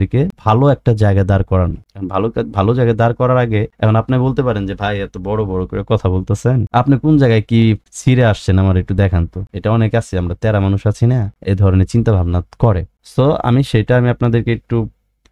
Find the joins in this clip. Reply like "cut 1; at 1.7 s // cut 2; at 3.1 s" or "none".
cut 1; at 9.4 s